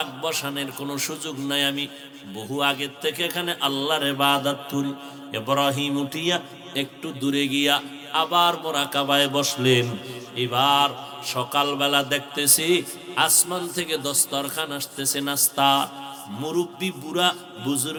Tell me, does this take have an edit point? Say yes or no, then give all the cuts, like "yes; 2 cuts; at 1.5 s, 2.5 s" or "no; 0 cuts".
no; 0 cuts